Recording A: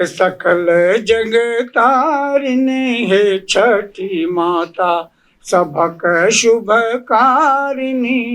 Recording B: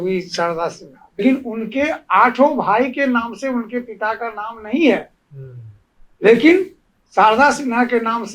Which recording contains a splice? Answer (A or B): B